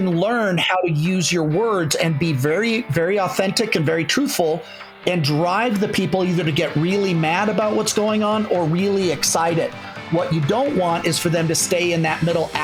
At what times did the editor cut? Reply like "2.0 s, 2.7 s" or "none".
none